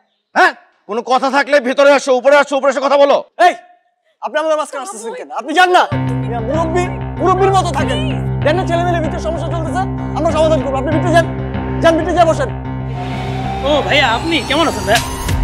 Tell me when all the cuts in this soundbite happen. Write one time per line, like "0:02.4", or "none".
0:13.0

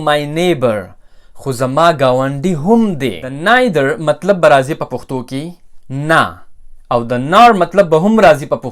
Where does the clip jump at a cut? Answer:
0:03.3

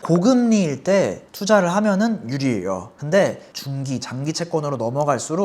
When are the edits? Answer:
0:03.5

